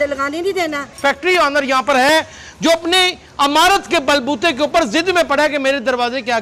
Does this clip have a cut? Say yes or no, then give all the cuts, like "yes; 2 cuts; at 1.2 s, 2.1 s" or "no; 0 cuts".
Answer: yes; 1 cut; at 0.9 s